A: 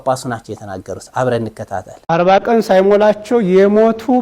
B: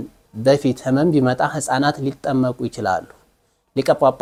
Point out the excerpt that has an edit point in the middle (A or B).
A